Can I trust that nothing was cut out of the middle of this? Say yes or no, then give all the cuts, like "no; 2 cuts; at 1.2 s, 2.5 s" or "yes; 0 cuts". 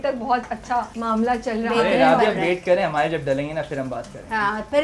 no; 1 cut; at 0.9 s